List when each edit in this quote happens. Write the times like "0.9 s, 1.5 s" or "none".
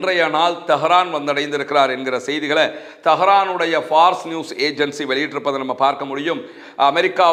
none